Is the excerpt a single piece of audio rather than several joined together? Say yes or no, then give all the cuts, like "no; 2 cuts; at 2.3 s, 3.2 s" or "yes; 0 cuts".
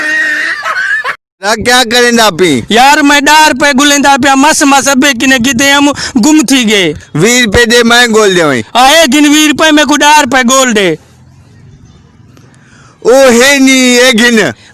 no; 1 cut; at 1.2 s